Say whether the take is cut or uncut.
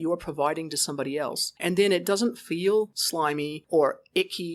cut